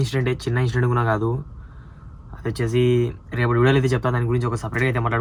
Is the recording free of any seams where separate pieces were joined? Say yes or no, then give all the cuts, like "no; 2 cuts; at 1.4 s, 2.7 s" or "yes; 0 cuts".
yes; 0 cuts